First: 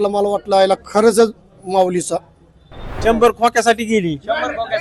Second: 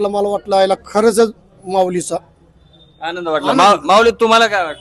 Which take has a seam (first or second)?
first